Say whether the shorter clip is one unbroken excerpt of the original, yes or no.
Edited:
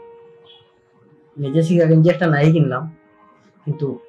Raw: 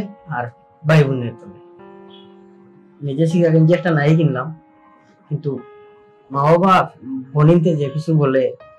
yes